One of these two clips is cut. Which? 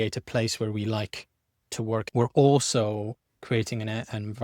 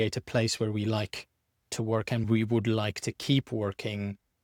first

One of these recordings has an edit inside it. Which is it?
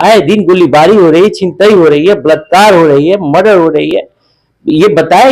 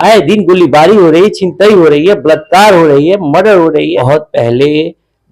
second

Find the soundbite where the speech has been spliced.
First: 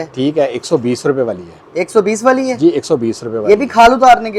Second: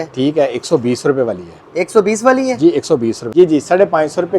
second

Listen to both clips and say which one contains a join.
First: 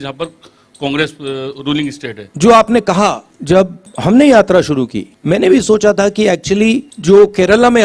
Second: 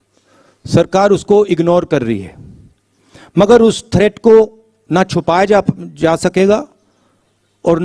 first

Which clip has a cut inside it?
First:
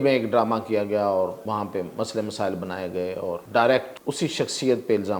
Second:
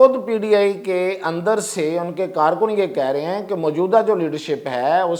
first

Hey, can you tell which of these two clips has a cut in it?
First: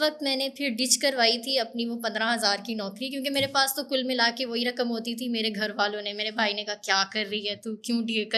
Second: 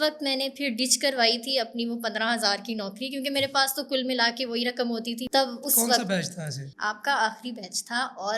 second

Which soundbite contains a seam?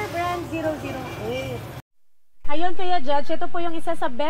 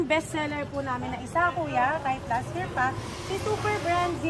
first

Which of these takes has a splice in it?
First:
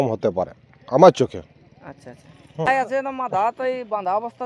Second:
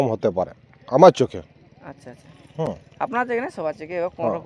first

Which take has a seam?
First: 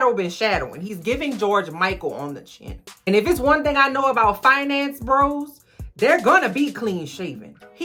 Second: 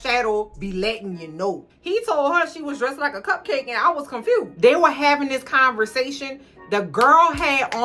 second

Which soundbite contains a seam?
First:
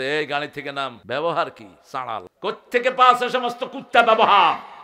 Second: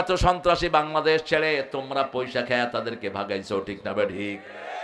first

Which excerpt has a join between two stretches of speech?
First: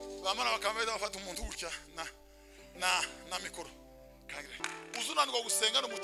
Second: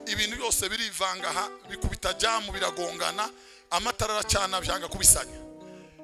first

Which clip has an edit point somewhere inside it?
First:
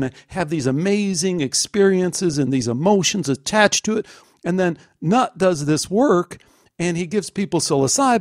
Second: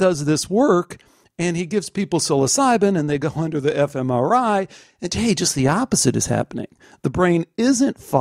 first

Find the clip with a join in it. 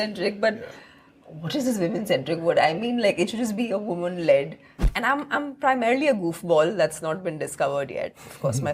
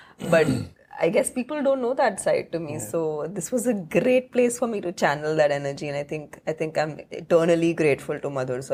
first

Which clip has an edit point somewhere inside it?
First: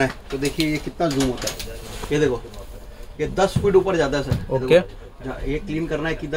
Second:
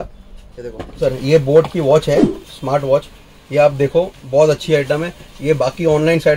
second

